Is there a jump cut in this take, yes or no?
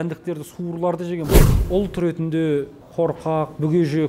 yes